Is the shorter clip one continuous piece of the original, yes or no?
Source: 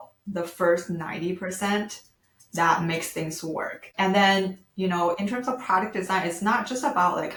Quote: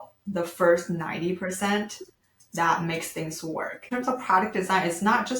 no